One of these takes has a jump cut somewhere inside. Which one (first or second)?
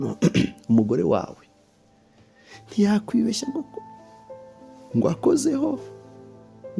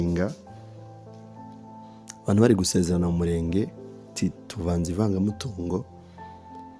second